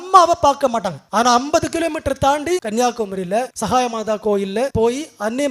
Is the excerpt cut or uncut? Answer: cut